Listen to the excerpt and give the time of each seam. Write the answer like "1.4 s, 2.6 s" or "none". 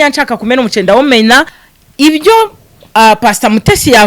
1.6 s